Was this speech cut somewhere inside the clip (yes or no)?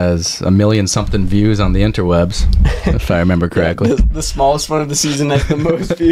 no